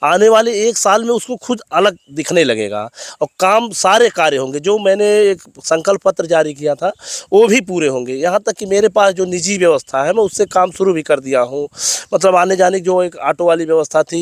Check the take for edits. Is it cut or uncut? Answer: uncut